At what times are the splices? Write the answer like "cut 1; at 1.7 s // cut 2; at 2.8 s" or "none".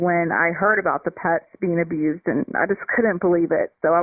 none